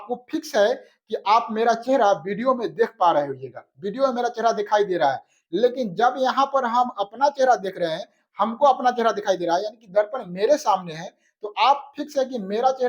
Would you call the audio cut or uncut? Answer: uncut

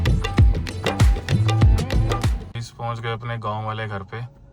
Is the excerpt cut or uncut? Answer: cut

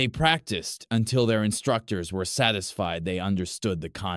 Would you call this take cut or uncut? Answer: cut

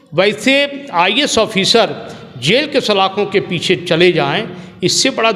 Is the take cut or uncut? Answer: uncut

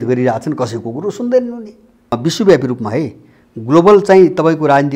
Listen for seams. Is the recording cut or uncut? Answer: cut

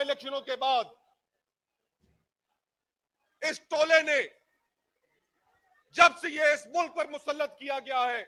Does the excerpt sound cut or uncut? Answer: uncut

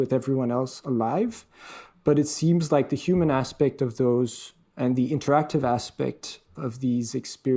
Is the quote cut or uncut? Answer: uncut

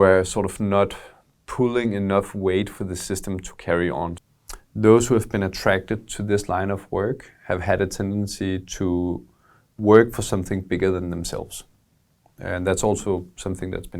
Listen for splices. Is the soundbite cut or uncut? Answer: cut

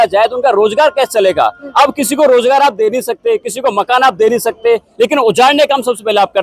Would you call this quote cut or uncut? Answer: uncut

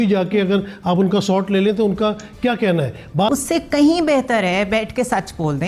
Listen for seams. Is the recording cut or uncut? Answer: cut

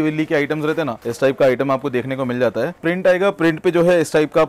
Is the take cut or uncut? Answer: cut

